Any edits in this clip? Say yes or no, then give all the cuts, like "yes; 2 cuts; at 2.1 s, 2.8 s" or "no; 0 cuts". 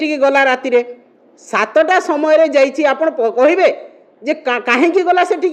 no; 0 cuts